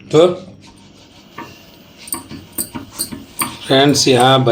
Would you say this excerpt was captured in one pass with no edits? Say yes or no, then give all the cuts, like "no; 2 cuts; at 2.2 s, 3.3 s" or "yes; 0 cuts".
no; 1 cut; at 0.9 s